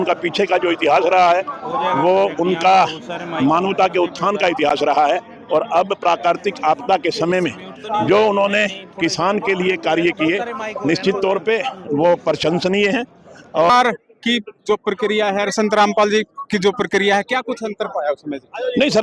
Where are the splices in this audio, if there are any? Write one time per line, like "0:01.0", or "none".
0:13.7